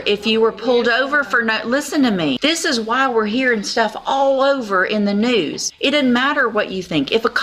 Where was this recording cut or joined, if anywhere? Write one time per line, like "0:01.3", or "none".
0:02.4
0:05.6